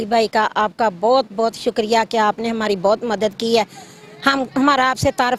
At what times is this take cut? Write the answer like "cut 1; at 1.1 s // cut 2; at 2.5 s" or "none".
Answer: none